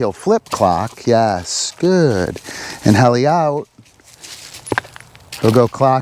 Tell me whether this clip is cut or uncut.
cut